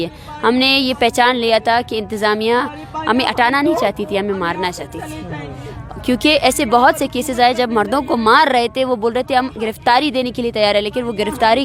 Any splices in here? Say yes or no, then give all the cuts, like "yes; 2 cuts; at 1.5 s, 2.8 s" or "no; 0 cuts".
no; 0 cuts